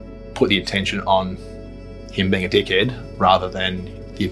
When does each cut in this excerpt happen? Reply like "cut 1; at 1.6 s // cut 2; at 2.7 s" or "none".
none